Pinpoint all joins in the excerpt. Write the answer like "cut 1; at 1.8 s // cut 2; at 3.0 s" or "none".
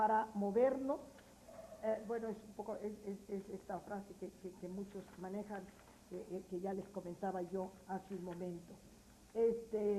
cut 1; at 8.0 s